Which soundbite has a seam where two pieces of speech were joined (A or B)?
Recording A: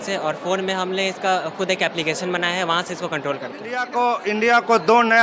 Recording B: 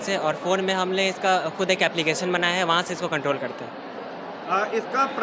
A